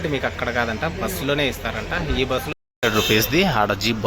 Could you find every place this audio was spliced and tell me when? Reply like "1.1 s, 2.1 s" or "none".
2.5 s